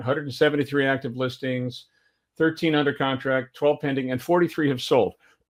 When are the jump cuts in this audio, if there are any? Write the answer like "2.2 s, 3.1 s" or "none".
none